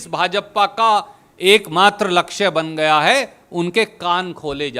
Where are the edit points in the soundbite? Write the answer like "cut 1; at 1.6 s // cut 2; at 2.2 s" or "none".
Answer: none